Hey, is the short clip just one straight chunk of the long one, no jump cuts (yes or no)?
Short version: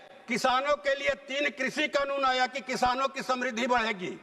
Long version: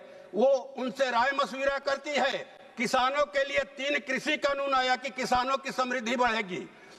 yes